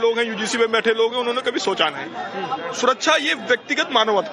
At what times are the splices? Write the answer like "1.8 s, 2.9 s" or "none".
1.0 s